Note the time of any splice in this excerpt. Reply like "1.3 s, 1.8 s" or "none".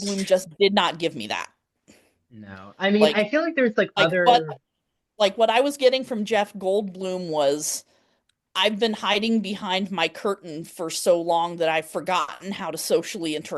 none